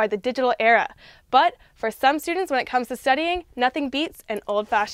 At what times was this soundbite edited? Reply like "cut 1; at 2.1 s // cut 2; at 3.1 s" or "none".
none